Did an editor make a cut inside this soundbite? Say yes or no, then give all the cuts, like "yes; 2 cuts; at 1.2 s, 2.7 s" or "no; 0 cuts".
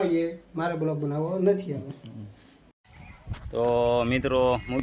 yes; 1 cut; at 2.7 s